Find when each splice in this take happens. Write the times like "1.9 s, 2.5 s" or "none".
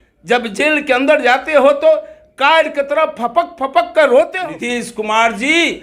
4.3 s